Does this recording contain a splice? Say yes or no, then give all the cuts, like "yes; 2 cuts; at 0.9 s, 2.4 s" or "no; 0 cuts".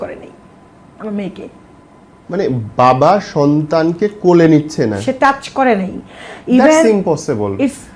no; 0 cuts